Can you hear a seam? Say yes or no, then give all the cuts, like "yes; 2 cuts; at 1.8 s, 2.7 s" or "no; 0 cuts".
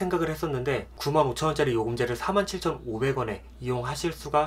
yes; 1 cut; at 0.9 s